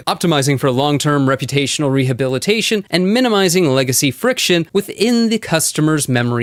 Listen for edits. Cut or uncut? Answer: uncut